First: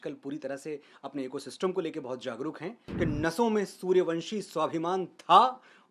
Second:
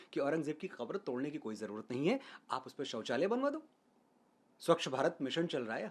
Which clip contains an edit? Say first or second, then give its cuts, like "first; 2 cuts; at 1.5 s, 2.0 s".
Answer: first; 1 cut; at 2.8 s